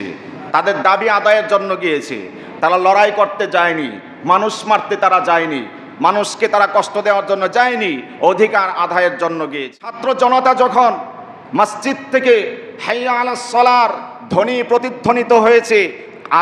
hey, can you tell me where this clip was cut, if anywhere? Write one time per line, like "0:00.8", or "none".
0:10.0